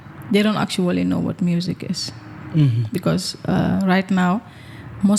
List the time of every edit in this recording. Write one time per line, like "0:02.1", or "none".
none